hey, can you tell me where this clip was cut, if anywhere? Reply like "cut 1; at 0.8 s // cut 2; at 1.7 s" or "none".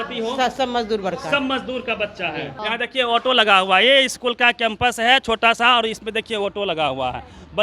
cut 1; at 2.6 s